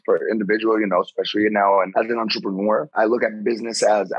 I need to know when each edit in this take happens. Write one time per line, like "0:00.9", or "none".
0:01.9
0:02.9